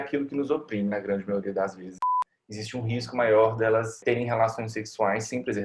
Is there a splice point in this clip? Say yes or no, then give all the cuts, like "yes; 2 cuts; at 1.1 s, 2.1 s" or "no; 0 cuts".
yes; 2 cuts; at 2.0 s, 4.0 s